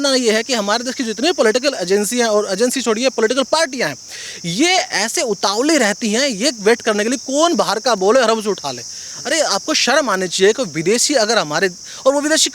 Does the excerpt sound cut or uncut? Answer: uncut